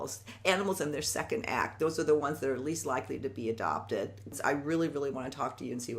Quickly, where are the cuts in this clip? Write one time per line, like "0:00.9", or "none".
0:04.3